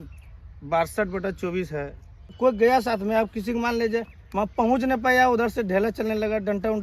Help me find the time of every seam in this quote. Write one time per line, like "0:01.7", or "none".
0:02.4